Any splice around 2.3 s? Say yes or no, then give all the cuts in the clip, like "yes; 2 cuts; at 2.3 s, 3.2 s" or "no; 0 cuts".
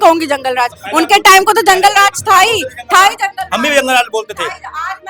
no; 0 cuts